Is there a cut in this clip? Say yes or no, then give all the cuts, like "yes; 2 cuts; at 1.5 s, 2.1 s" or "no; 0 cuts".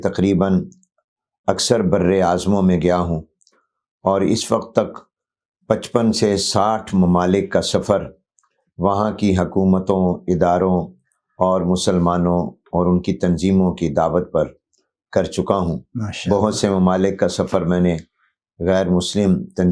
no; 0 cuts